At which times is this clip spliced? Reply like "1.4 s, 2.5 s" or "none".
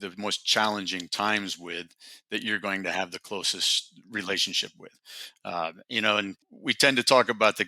6.5 s